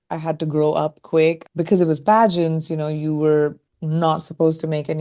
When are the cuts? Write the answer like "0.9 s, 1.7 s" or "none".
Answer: 1.4 s